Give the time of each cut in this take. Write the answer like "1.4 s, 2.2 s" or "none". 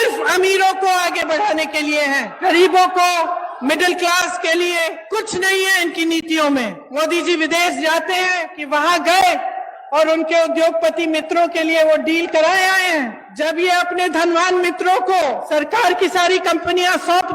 2.3 s, 5.0 s, 6.8 s, 8.5 s, 13.3 s, 15.4 s